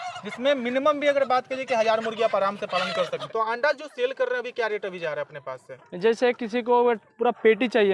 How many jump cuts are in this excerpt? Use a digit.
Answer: 1